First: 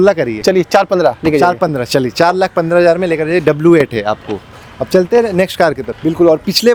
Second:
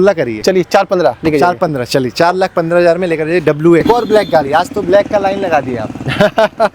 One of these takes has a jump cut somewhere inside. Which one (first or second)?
second